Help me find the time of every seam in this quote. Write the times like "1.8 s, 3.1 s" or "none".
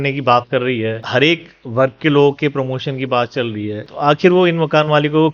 1.0 s